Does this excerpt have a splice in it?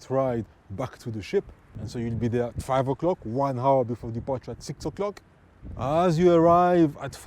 yes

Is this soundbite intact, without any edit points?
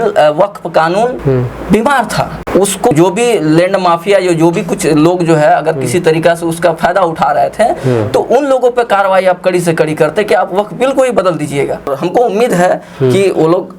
no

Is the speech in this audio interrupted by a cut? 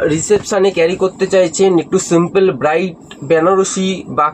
no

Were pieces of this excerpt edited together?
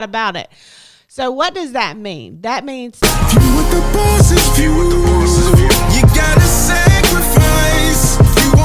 yes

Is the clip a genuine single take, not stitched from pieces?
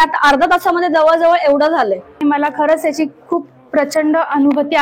no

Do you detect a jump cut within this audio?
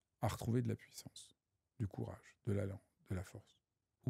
no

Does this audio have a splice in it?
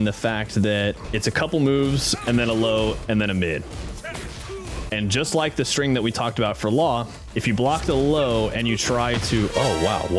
yes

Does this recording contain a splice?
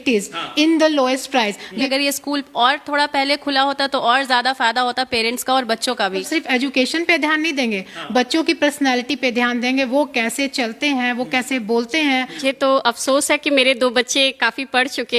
yes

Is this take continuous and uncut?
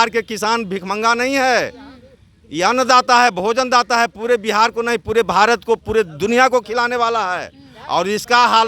yes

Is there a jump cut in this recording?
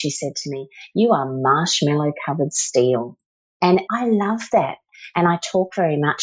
yes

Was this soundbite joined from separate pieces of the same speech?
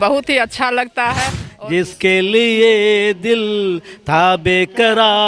yes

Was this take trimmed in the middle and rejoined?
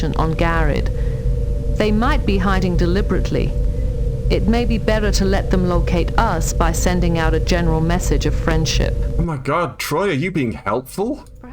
no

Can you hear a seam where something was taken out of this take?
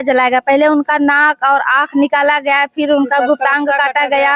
no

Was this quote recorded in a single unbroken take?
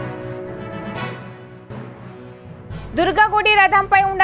no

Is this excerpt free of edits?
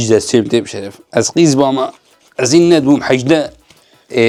yes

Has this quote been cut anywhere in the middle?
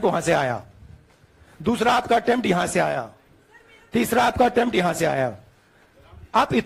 no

